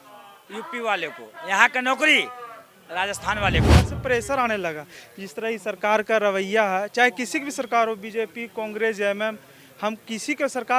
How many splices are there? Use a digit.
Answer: 1